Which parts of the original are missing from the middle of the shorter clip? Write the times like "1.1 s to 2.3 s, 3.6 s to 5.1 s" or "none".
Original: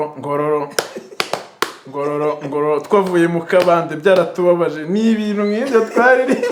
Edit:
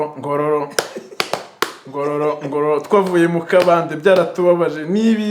none